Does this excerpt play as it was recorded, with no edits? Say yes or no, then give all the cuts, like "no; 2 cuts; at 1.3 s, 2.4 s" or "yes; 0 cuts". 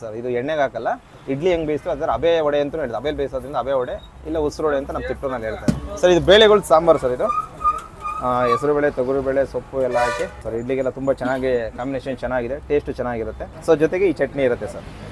yes; 0 cuts